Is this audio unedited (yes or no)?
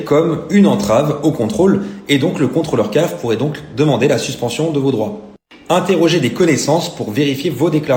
yes